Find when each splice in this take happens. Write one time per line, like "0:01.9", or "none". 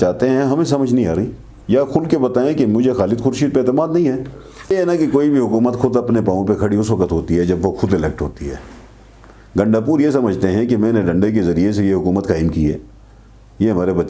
0:04.7